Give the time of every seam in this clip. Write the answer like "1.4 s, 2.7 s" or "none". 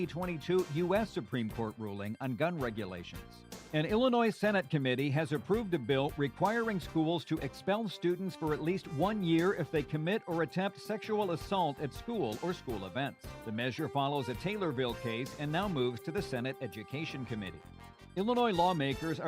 3.6 s